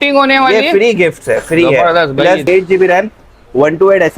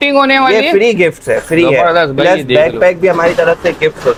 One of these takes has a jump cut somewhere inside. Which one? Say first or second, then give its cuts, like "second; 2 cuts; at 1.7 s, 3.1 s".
first; 1 cut; at 2.5 s